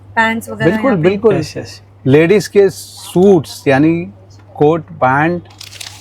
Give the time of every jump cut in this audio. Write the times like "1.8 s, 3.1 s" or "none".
none